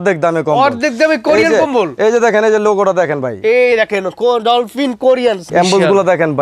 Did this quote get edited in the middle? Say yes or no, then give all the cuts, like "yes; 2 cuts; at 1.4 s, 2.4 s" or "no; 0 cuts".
yes; 1 cut; at 5.4 s